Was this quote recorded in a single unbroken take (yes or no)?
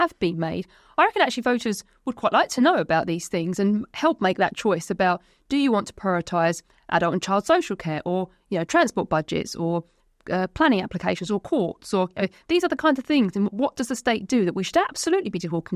yes